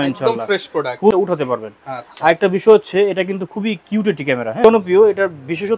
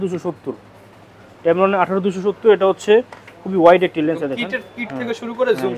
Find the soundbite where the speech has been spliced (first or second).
first